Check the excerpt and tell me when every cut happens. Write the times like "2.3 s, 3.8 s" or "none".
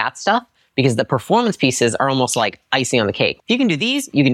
3.3 s